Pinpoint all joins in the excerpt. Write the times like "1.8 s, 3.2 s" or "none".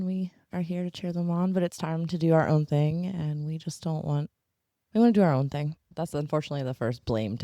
5.8 s